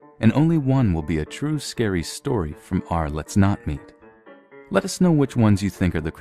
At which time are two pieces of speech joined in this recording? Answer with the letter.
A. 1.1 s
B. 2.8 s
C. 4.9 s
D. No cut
C